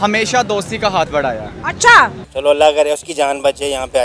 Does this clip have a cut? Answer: no; 0 cuts

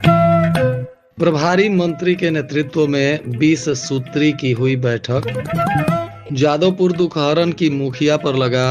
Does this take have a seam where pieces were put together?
yes; 1 cut; at 0.9 s

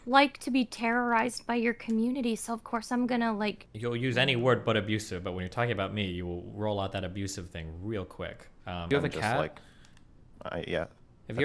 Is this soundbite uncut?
no; 2 cuts; at 3.7 s, 8.8 s

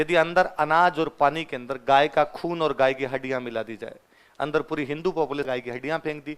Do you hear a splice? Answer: yes; 1 cut; at 5.5 s

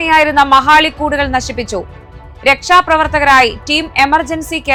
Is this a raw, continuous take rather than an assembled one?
yes; 0 cuts

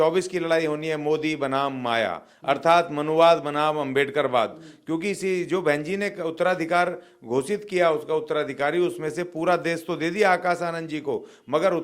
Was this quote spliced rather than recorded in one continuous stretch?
no; 0 cuts

